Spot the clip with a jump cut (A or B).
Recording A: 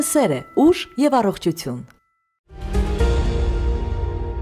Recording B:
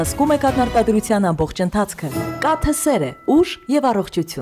A